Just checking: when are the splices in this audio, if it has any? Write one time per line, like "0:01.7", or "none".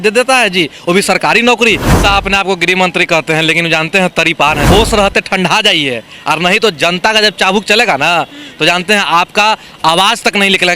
0:01.9
0:04.6